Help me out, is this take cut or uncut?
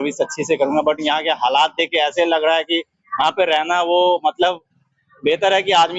uncut